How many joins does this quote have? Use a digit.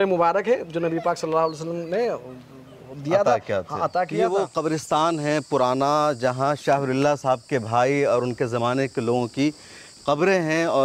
1